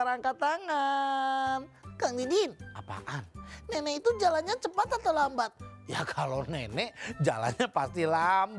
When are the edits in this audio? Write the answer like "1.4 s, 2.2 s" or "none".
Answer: 1.8 s